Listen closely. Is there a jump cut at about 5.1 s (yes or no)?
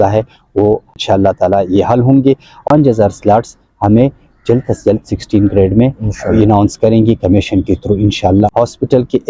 no